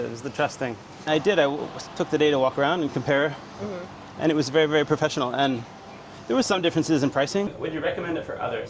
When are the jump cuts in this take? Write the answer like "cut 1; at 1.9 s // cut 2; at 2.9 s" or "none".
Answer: cut 1; at 1.1 s // cut 2; at 7.5 s